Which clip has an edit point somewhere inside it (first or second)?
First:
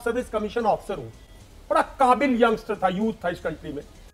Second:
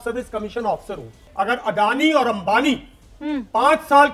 second